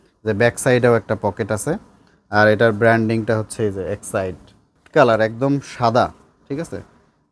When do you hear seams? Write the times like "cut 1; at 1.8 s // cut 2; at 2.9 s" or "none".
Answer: cut 1; at 4.8 s